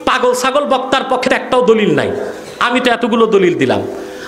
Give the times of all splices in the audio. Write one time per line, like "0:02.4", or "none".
0:01.3